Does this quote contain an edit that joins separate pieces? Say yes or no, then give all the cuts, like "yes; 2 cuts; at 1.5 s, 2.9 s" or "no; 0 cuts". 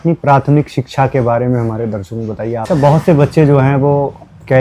yes; 1 cut; at 2.6 s